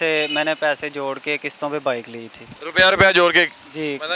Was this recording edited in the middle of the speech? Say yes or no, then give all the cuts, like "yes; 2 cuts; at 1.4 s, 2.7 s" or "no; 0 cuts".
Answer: no; 0 cuts